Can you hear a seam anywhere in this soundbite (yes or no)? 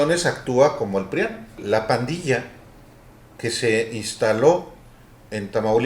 yes